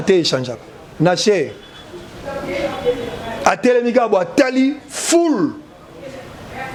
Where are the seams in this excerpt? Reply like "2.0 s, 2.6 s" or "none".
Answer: none